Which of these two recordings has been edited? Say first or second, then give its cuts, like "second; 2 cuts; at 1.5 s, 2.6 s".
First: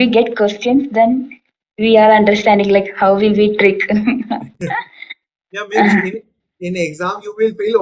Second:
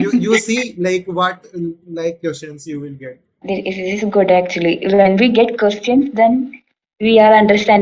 second; 1 cut; at 3.4 s